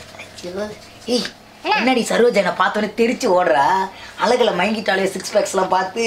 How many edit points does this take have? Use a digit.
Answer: 0